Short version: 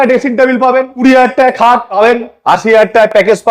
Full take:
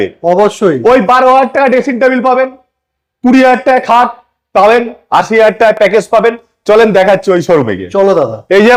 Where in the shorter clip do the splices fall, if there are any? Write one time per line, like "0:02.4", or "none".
0:00.9
0:01.9